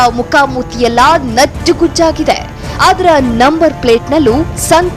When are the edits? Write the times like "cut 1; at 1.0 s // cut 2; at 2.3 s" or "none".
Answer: none